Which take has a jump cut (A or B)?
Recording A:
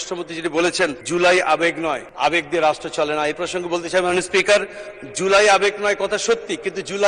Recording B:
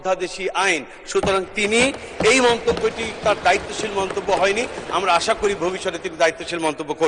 A